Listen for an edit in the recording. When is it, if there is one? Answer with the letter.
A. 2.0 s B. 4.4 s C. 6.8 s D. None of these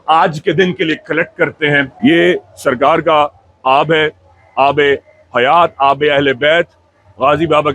A